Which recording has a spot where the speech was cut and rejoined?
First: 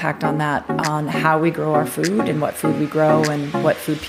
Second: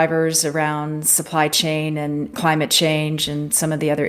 second; 1 cut; at 2.3 s

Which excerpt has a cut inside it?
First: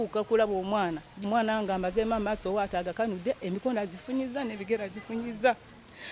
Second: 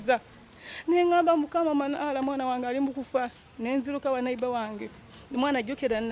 first; 1 cut; at 1.2 s

